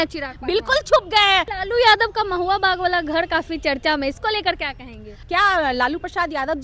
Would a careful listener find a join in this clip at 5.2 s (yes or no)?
yes